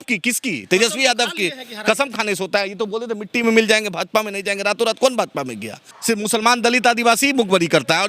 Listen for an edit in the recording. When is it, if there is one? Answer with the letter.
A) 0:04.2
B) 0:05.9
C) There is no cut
B